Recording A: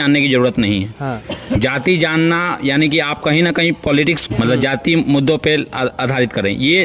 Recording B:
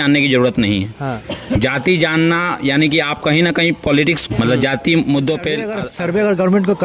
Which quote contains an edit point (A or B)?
B